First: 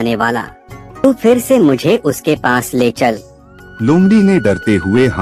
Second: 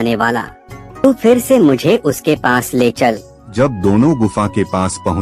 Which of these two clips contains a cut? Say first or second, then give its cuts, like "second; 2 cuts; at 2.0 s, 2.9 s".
second; 1 cut; at 3.5 s